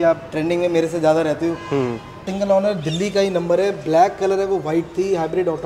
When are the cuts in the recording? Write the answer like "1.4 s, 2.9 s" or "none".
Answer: 2.3 s